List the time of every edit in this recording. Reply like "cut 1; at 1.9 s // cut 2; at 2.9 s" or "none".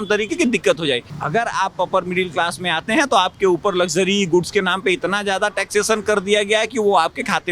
cut 1; at 1.1 s